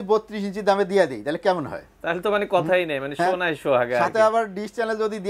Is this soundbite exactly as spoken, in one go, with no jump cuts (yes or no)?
yes